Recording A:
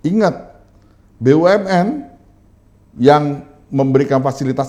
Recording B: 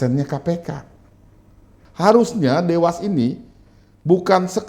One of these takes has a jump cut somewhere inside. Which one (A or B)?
B